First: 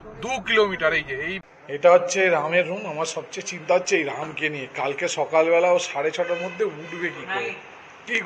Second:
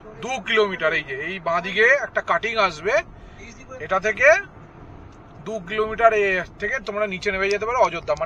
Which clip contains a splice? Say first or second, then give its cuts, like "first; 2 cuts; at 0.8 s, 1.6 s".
first; 1 cut; at 1.3 s